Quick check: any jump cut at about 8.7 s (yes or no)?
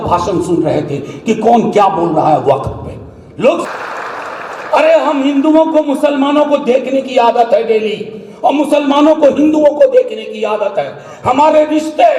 no